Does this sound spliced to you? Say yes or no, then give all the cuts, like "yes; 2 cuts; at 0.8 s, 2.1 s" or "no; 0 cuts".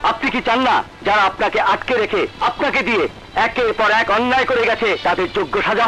yes; 3 cuts; at 0.9 s, 2.3 s, 5.0 s